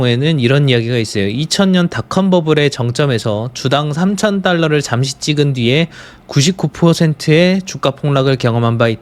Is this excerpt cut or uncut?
uncut